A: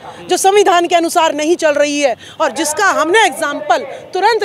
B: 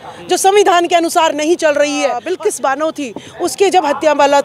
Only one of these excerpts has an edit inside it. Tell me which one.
B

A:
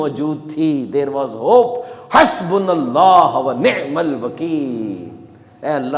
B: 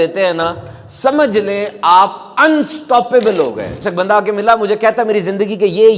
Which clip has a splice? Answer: B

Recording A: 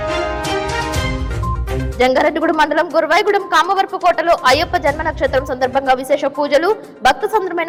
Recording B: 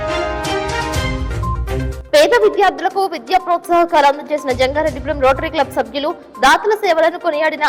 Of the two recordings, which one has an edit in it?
B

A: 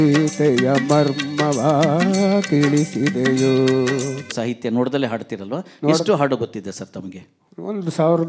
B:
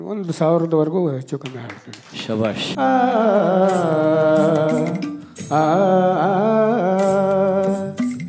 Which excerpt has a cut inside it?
B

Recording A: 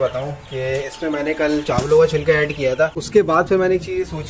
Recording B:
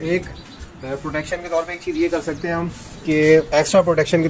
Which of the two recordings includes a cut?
A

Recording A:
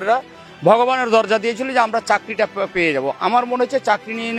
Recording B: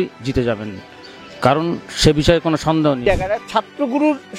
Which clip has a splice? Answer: B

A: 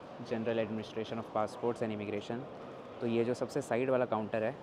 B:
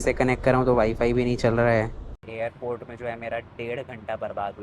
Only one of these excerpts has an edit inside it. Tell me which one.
B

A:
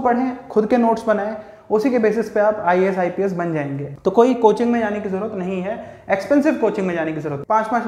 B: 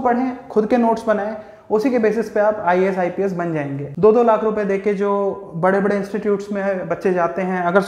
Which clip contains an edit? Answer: B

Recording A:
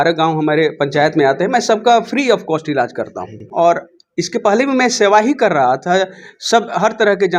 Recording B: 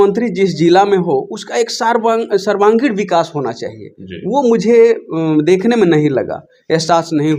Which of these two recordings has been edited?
A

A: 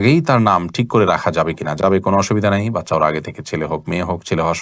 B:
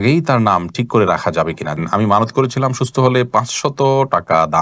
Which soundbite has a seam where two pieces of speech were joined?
B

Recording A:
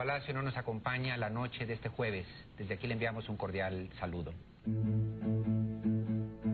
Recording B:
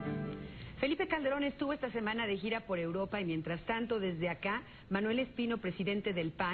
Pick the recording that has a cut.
A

